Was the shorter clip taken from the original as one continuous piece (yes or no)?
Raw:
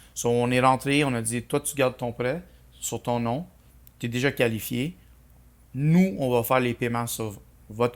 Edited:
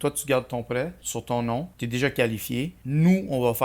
no